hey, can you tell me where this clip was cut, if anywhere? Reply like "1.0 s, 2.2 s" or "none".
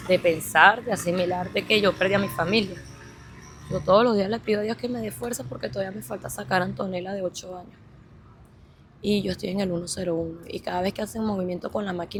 none